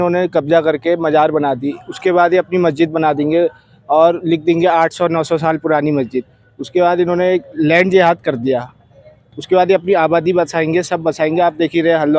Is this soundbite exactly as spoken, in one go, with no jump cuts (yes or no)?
yes